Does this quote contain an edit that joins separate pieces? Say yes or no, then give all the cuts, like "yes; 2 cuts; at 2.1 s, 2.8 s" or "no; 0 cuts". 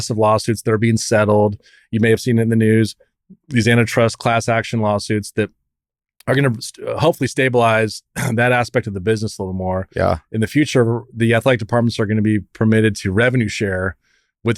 no; 0 cuts